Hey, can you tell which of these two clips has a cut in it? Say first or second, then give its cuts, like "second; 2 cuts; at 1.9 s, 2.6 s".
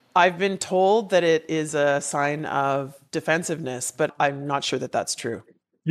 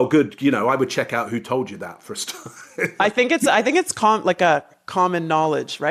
first; 1 cut; at 4.1 s